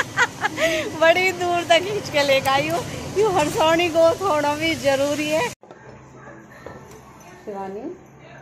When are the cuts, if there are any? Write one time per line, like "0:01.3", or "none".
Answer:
0:05.6